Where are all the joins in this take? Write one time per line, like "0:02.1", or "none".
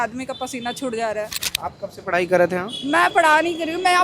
0:01.4